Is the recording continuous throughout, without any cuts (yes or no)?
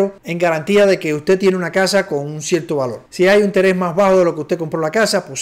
yes